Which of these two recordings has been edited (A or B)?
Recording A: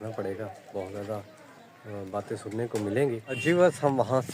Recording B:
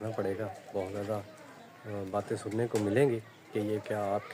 A